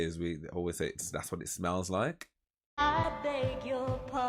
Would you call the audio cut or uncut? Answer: uncut